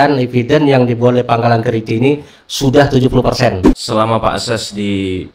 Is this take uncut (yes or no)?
no